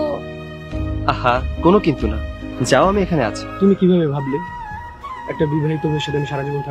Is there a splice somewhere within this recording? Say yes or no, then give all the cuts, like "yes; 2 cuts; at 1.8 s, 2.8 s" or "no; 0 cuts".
yes; 1 cut; at 3.4 s